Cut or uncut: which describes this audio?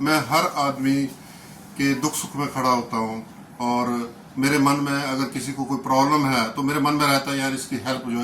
uncut